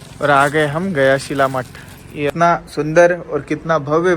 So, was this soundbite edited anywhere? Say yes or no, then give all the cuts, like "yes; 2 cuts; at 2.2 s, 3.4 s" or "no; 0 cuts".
yes; 1 cut; at 2.3 s